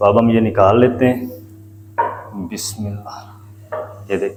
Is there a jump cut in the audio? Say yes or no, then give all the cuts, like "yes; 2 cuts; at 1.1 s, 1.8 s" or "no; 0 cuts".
no; 0 cuts